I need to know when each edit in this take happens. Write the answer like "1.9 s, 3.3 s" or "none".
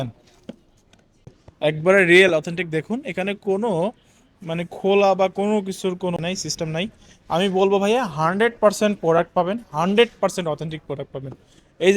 1.4 s, 6.2 s